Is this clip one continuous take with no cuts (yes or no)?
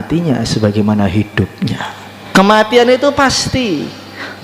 no